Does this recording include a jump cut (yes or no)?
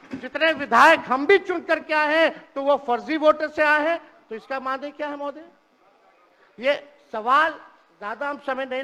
no